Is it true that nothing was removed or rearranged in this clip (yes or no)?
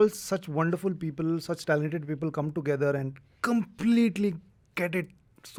yes